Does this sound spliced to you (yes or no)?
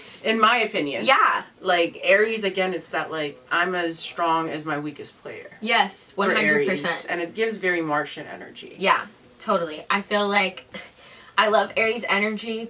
no